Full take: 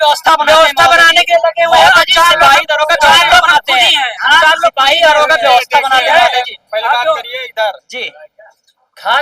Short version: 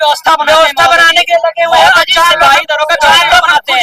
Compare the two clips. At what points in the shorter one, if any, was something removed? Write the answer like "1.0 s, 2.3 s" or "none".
none